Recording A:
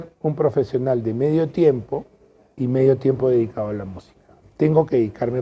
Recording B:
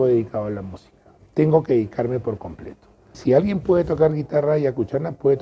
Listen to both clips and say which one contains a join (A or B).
B